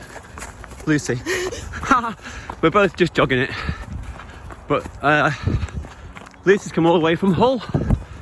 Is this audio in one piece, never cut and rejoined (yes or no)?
yes